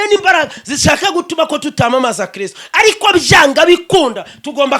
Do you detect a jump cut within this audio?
no; 0 cuts

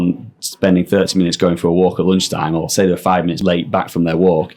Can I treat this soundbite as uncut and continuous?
no; 1 cut; at 3.4 s

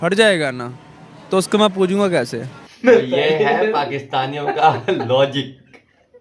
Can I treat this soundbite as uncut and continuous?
yes; 0 cuts

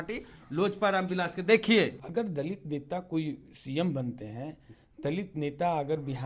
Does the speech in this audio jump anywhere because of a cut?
yes; 1 cut; at 2.0 s

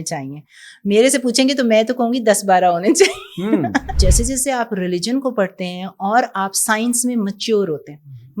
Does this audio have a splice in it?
yes; 1 cut; at 3.9 s

